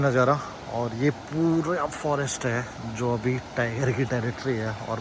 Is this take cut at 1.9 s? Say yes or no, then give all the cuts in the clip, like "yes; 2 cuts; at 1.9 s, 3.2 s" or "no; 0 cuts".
no; 0 cuts